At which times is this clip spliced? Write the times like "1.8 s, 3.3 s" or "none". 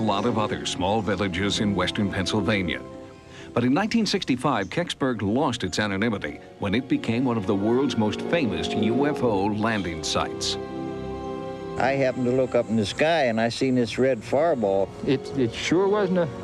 none